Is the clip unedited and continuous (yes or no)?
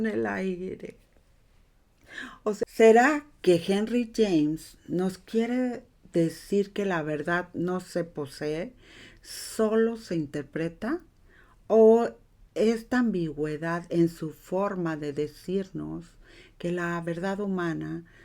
no